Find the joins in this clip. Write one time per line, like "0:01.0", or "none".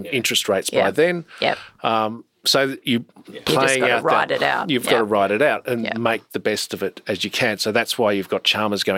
none